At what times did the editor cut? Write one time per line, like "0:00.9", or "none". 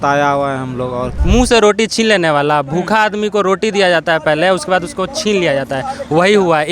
0:01.1